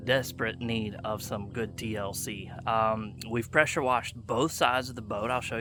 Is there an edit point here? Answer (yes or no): no